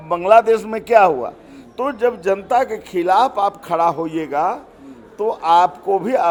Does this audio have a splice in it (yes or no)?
no